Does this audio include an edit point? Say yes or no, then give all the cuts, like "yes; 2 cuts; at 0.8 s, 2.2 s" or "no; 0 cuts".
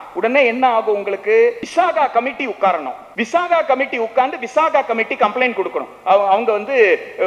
yes; 2 cuts; at 1.6 s, 3.0 s